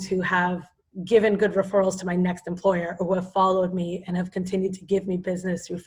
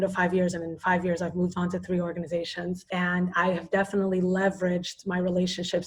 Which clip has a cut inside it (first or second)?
second